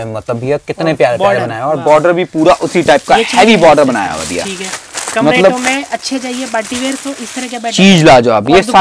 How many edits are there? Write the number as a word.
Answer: zero